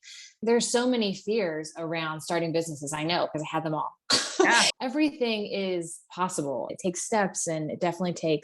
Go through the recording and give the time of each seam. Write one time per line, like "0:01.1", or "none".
0:04.7
0:06.7